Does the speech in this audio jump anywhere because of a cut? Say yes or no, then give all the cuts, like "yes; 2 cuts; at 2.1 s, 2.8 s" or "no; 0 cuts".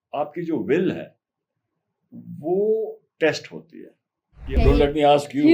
yes; 1 cut; at 4.6 s